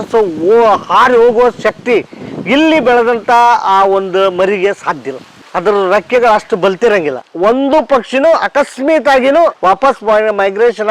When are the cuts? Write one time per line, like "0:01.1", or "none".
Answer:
0:07.2
0:09.6